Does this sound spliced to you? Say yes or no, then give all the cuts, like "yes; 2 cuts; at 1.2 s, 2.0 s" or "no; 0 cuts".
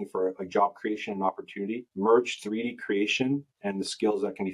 no; 0 cuts